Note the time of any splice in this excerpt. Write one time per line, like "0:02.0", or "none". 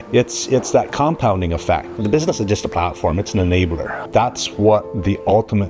0:01.9
0:03.9